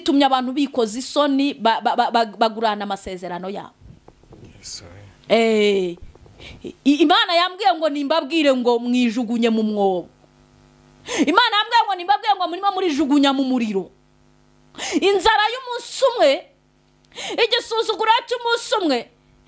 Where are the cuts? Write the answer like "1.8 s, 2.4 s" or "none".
none